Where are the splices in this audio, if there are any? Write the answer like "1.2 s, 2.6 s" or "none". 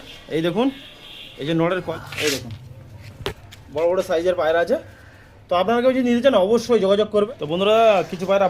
1.9 s, 7.3 s